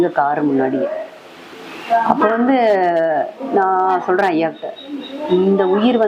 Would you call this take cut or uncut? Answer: uncut